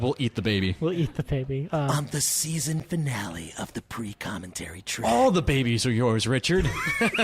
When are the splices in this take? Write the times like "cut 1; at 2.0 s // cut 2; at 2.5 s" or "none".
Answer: cut 1; at 1.9 s // cut 2; at 5.0 s